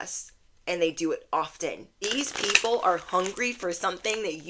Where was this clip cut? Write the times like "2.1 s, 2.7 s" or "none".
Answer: 1.9 s